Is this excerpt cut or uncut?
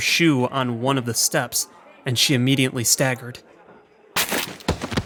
uncut